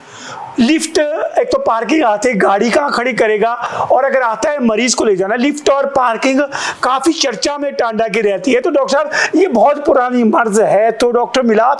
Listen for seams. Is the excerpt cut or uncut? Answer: uncut